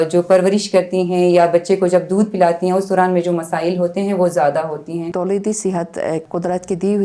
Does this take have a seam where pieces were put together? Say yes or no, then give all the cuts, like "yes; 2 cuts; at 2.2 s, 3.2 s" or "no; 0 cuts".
yes; 1 cut; at 5.1 s